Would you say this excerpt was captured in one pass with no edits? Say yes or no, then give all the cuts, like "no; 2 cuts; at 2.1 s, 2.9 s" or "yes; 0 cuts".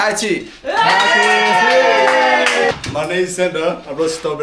no; 1 cut; at 2.7 s